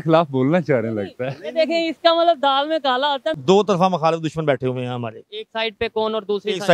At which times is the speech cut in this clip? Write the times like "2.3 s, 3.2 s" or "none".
3.4 s